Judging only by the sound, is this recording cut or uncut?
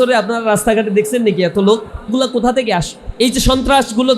cut